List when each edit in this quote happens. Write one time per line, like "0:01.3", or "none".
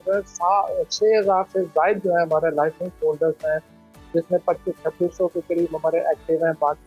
none